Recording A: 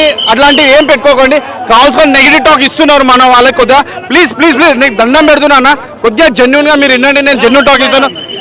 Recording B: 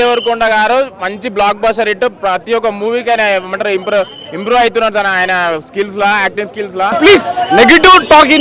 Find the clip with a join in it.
B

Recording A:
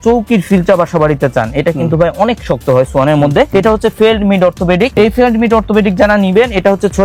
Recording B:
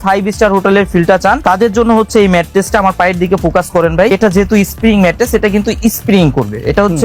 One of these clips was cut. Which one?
B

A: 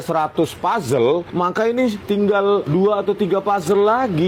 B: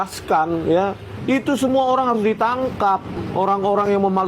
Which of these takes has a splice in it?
B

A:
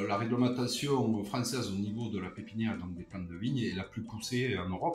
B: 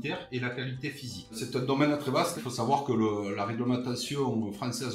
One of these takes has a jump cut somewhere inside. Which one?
B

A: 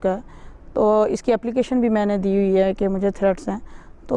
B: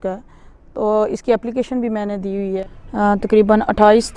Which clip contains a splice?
B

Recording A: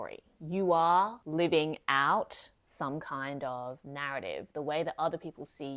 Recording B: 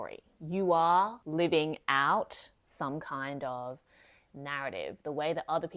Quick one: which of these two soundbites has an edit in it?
A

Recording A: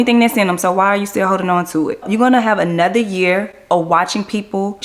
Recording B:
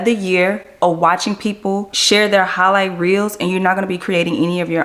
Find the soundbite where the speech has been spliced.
A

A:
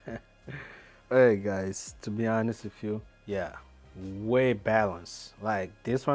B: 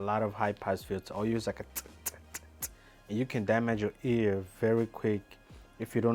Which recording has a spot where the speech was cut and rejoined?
A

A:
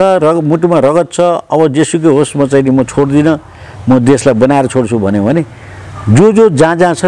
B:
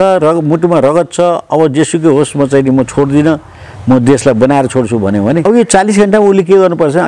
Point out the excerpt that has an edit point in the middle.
B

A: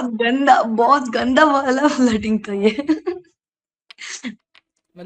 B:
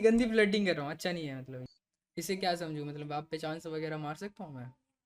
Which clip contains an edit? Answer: B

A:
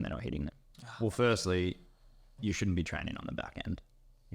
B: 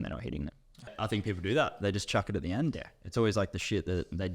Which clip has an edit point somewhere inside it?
B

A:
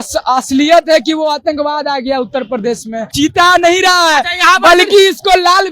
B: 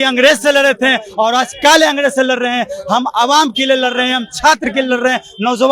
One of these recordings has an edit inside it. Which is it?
A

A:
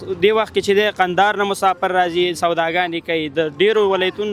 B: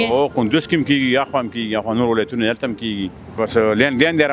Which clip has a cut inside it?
B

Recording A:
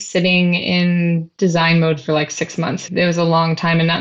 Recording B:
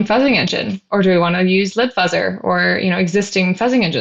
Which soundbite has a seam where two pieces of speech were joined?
A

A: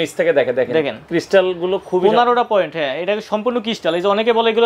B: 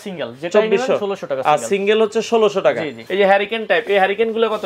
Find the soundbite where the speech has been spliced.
B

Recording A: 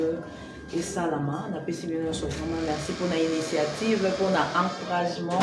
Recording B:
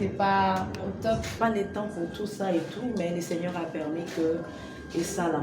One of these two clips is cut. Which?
B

